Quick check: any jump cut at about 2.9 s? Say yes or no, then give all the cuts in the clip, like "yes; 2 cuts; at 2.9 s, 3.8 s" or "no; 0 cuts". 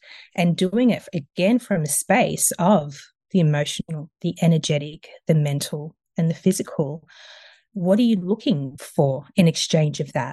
no; 1 cut; at 8.8 s